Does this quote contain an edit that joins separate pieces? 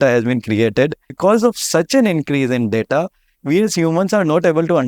yes; 1 cut; at 1.1 s

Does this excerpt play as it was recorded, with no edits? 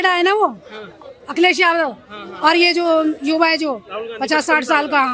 yes; 0 cuts

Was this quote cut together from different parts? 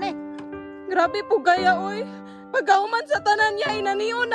no; 0 cuts

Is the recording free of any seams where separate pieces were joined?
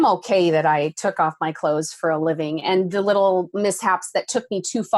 yes; 0 cuts

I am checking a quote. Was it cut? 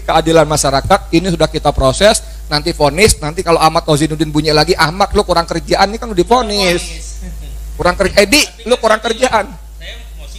no; 0 cuts

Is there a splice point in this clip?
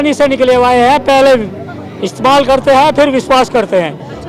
no; 0 cuts

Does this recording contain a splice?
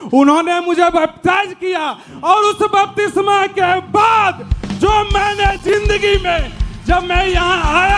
no; 0 cuts

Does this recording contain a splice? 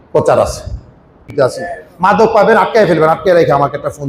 yes; 1 cut; at 1.3 s

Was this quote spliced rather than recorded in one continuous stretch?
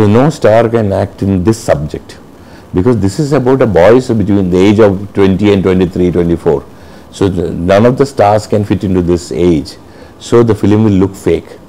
no; 0 cuts

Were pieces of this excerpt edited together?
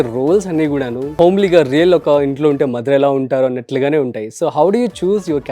yes; 1 cut; at 1.1 s

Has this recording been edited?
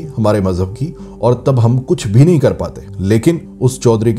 no; 0 cuts

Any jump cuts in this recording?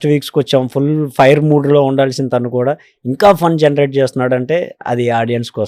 no; 0 cuts

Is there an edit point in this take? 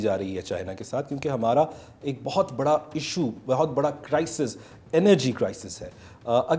no; 0 cuts

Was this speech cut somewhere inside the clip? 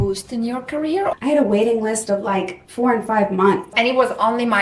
yes; 2 cuts; at 1.2 s, 3.7 s

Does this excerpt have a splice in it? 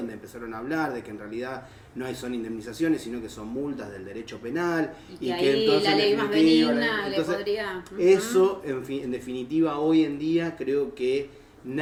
no; 0 cuts

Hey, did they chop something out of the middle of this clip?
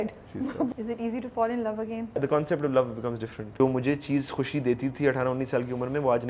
yes; 3 cuts; at 0.7 s, 2.2 s, 3.5 s

